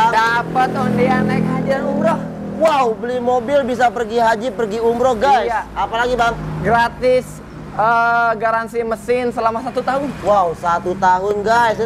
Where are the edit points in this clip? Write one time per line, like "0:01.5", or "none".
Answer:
none